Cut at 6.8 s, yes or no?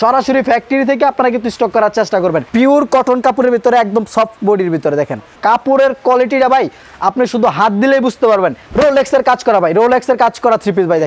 no